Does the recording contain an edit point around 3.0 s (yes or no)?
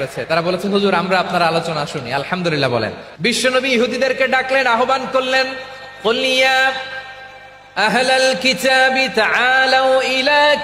yes